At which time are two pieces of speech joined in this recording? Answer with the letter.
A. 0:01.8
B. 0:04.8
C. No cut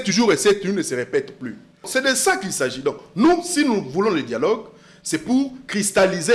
A